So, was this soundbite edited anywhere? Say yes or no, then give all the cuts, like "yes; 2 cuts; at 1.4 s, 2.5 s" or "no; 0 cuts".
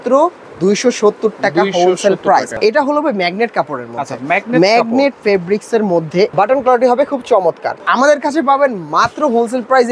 yes; 3 cuts; at 2.6 s, 6.3 s, 7.8 s